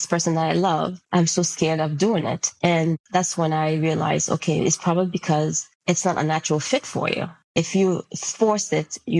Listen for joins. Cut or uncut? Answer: cut